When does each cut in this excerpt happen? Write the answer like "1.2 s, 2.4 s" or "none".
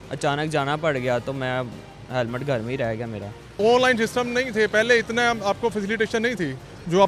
3.6 s

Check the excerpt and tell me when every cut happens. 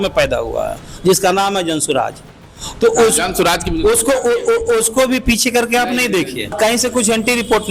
6.6 s

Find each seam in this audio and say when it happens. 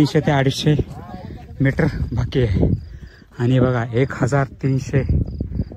none

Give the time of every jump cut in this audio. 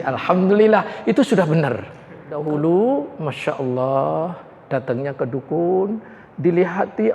2.4 s

